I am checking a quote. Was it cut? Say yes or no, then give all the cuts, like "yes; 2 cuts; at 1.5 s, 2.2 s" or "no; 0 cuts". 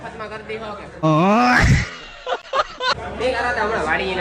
yes; 2 cuts; at 1.0 s, 2.9 s